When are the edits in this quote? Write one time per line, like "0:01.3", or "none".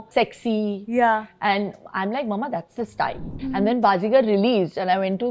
0:03.3